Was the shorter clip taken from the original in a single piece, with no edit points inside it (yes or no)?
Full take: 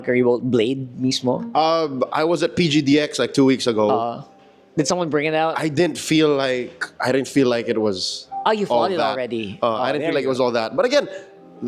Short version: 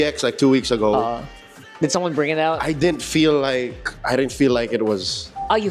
yes